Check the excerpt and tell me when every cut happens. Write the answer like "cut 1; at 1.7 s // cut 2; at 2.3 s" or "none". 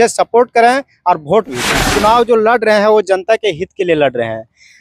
cut 1; at 1.9 s

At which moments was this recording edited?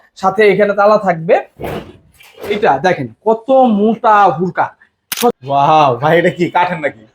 cut 1; at 5.3 s

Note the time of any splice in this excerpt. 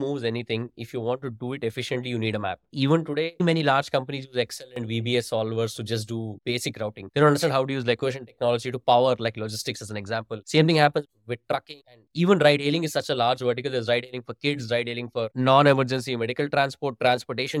none

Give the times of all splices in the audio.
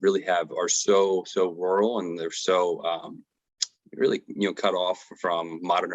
none

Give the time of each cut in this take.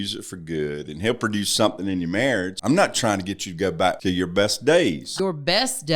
cut 1; at 2.5 s // cut 2; at 4.0 s // cut 3; at 5.1 s

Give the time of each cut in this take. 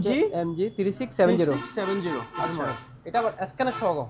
none

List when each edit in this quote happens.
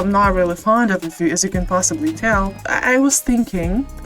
cut 1; at 2.6 s

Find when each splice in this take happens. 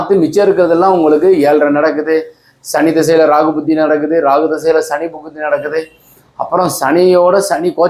none

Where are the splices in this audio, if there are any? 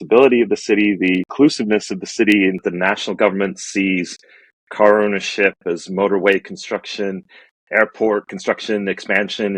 cut 1; at 1.3 s // cut 2; at 2.6 s // cut 3; at 8.3 s

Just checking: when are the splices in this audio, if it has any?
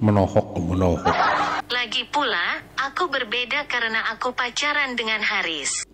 cut 1; at 1.6 s

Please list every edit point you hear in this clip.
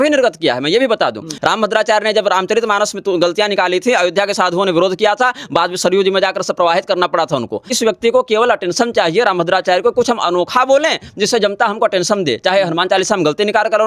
cut 1; at 1.3 s // cut 2; at 7.8 s

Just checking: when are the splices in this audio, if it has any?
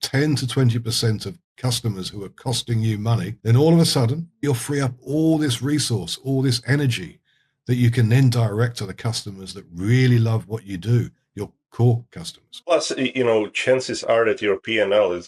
cut 1; at 4.3 s

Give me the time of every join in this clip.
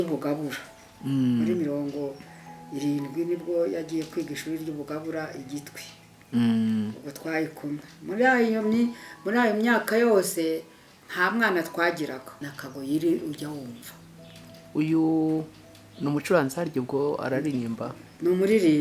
cut 1; at 12.6 s

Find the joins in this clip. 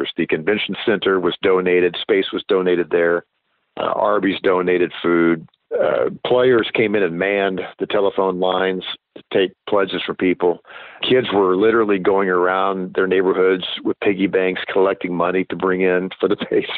cut 1; at 5.6 s // cut 2; at 11.0 s

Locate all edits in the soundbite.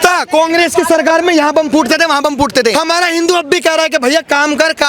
cut 1; at 2.7 s

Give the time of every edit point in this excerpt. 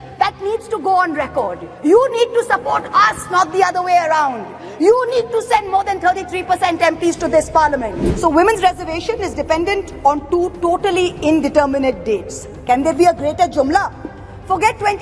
cut 1; at 8.0 s

